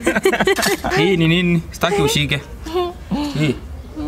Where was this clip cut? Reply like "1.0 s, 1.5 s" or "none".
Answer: 0.9 s